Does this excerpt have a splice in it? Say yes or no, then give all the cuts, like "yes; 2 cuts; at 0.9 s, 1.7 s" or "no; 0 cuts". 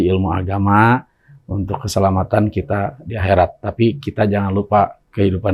no; 0 cuts